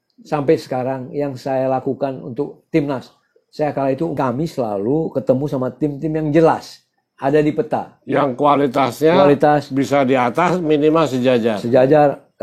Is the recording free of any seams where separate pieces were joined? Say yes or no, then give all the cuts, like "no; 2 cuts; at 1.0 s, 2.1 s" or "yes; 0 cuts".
no; 1 cut; at 4.1 s